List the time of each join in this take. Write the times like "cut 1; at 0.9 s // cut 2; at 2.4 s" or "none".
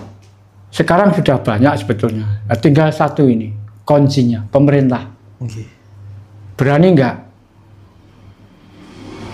none